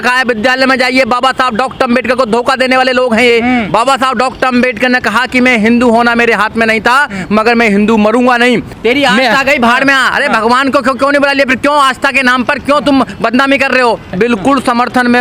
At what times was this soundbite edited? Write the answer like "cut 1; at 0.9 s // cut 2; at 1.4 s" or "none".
cut 1; at 8.7 s // cut 2; at 14.1 s